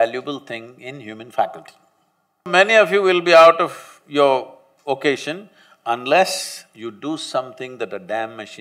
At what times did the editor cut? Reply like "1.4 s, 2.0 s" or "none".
2.5 s